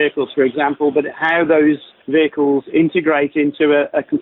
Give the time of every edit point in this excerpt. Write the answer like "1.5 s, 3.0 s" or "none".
none